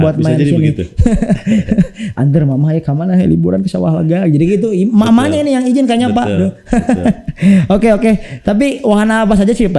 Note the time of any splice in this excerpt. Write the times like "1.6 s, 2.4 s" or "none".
none